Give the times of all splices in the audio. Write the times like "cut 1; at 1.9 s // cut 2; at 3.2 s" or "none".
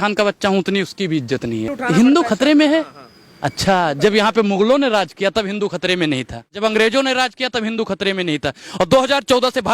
cut 1; at 1.8 s // cut 2; at 6.6 s